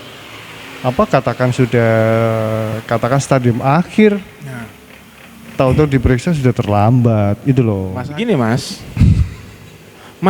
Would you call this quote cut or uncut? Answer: cut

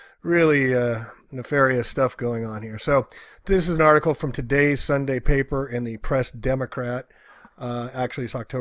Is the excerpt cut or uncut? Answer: cut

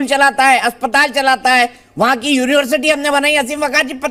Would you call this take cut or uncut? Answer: uncut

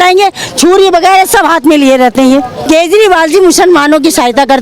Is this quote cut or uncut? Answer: cut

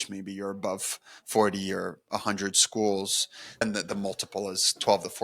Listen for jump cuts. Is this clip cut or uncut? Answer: cut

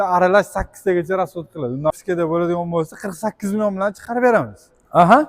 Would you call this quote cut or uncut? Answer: cut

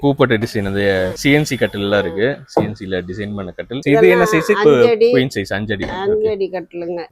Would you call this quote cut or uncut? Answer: uncut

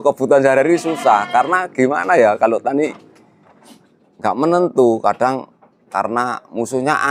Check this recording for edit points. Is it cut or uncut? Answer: uncut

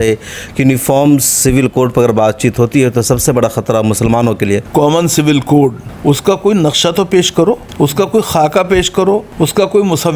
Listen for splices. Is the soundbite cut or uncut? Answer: cut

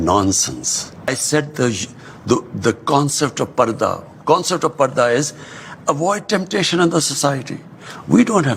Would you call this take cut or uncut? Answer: cut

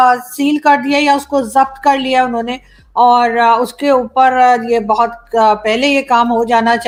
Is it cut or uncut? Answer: uncut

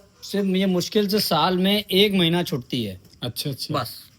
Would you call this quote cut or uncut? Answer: uncut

